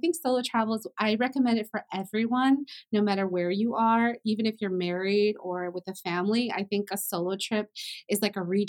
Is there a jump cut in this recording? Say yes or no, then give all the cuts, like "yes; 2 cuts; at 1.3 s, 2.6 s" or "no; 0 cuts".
no; 0 cuts